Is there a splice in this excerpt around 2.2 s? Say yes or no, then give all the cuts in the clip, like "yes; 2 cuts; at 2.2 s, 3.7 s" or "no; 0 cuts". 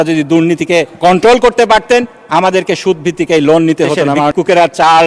no; 2 cuts; at 0.9 s, 4.3 s